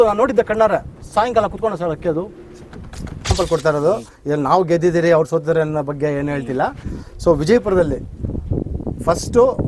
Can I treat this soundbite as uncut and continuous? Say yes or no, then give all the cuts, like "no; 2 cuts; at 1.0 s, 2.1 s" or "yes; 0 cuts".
no; 1 cut; at 3.3 s